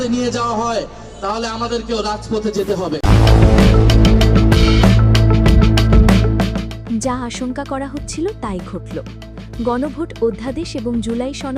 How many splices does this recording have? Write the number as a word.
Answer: one